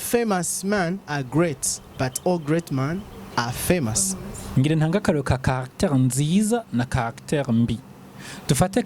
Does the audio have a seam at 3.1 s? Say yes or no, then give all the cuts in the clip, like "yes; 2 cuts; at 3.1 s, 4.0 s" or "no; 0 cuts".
no; 1 cut; at 4.4 s